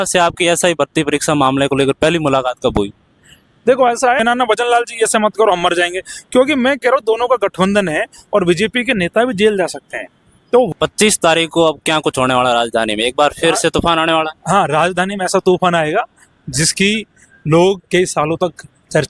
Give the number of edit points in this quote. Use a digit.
2